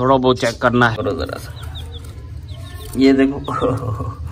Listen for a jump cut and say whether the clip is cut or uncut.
cut